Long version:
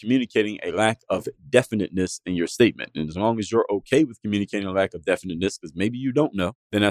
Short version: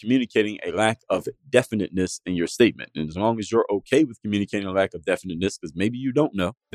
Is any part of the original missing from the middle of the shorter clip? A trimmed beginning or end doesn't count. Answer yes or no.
no